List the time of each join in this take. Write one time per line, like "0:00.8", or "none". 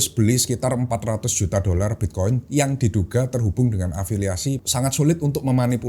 0:04.6